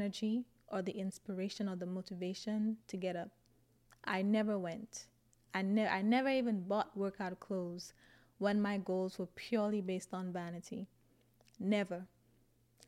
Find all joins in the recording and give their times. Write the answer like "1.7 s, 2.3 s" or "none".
none